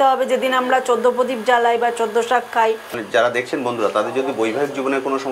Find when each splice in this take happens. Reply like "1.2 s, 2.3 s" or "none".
2.9 s